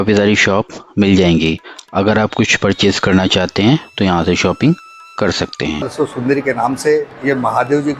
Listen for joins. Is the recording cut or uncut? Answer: cut